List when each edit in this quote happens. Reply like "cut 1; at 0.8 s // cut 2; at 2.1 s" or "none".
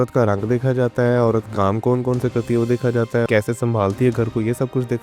cut 1; at 3.3 s